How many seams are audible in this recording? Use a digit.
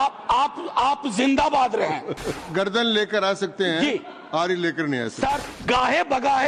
2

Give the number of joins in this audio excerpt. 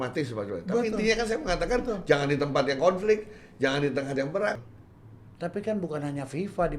1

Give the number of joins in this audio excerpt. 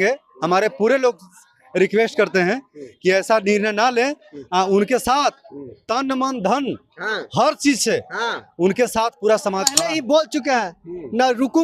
1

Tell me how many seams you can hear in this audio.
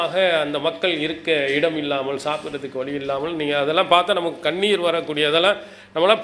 0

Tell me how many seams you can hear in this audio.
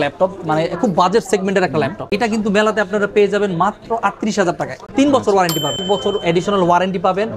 3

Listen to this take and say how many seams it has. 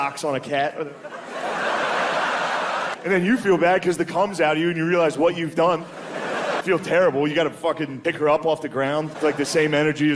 4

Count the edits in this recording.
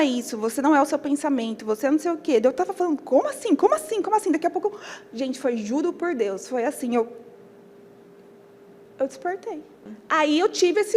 2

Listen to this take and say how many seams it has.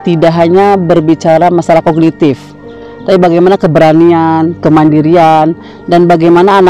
0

